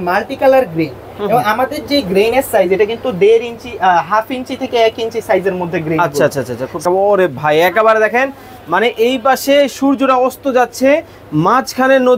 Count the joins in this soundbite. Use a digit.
1